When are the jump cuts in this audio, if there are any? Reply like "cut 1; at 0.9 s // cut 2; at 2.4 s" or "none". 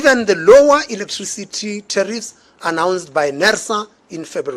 none